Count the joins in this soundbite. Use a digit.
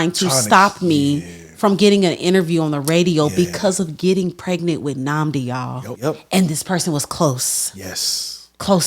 1